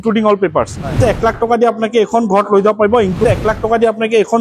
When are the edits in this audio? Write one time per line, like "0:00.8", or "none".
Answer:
0:01.0
0:03.2